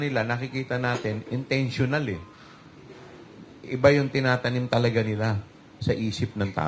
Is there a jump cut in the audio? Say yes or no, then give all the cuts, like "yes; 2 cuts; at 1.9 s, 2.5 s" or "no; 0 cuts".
no; 0 cuts